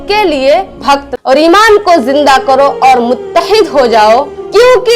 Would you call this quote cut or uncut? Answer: cut